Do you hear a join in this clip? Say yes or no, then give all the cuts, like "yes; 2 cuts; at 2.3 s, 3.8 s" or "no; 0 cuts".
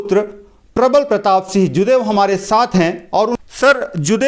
yes; 1 cut; at 3.3 s